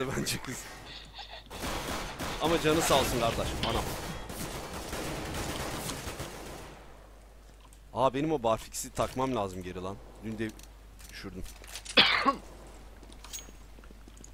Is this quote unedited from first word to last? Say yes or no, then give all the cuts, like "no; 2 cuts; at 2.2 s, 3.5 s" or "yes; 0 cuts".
no; 1 cut; at 3.6 s